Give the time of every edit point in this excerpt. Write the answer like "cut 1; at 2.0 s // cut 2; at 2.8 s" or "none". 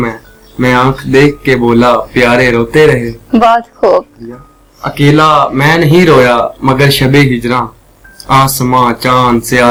none